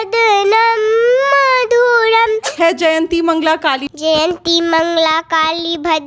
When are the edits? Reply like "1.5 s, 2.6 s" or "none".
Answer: 2.5 s, 3.8 s